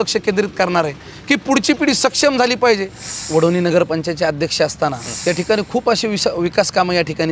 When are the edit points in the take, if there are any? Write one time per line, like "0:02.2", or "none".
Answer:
0:03.2
0:05.1